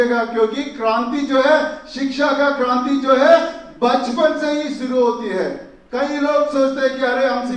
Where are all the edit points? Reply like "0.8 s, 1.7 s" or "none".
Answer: none